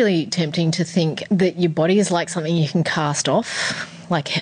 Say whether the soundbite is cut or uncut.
cut